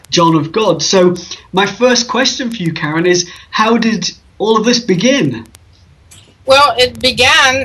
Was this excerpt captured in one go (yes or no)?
no